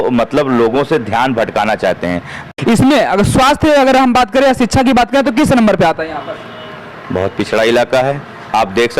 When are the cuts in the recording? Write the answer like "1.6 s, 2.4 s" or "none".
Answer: 2.5 s